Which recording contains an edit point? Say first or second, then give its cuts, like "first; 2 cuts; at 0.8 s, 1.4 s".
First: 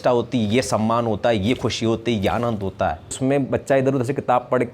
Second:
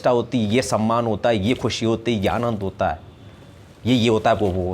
first; 1 cut; at 3.2 s